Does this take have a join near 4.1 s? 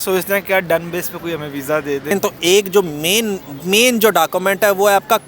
no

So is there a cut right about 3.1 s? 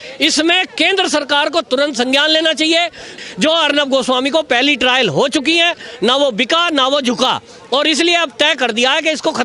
yes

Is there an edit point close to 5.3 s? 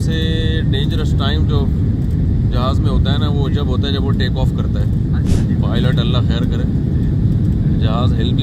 yes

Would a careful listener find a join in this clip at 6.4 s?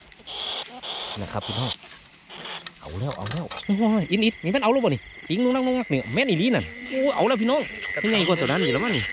no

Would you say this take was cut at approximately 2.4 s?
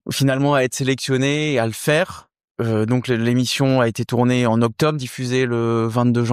yes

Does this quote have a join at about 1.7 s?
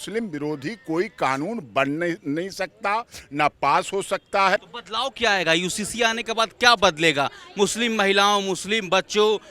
no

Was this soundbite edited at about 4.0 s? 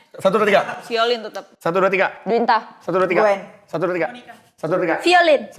no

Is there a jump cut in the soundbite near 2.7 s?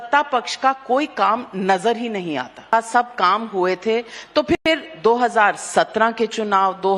yes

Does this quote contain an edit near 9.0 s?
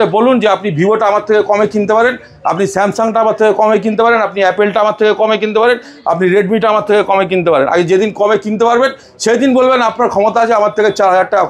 no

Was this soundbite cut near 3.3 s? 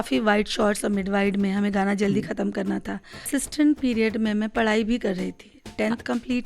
yes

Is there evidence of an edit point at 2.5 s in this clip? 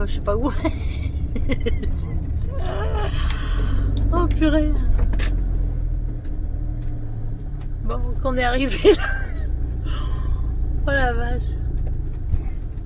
no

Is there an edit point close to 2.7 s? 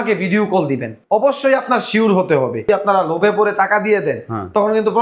yes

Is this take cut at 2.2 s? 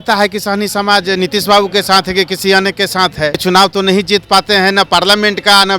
no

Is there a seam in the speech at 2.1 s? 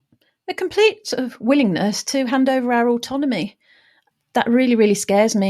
no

